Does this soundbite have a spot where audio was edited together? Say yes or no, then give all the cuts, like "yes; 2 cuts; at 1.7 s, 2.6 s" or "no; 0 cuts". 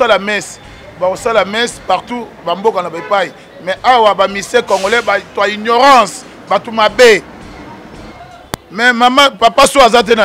yes; 1 cut; at 8.0 s